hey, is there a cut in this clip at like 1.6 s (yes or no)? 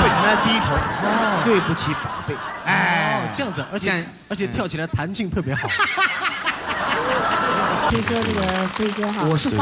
no